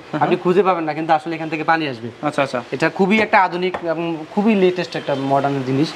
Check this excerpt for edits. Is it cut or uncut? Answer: uncut